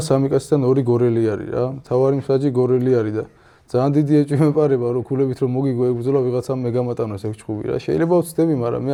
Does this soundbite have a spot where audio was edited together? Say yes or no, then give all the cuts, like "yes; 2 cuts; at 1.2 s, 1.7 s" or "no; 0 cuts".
no; 0 cuts